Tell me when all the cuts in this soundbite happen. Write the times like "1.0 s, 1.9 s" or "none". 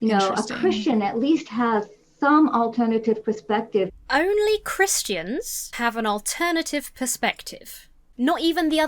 3.9 s, 5.6 s